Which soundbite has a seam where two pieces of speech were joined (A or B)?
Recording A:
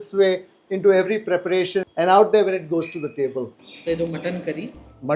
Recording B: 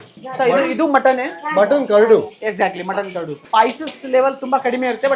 A